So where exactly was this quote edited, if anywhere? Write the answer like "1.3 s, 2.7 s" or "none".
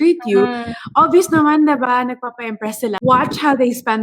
3.0 s